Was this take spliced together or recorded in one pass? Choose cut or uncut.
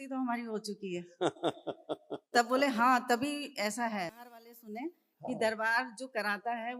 cut